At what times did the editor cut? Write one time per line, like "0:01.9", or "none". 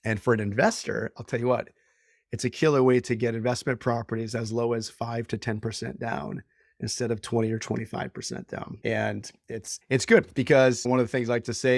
0:08.7
0:09.7
0:10.8